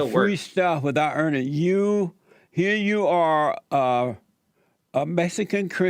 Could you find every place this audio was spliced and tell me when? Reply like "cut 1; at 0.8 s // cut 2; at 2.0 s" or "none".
none